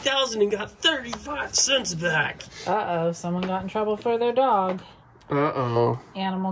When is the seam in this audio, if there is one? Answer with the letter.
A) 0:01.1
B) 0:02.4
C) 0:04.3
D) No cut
B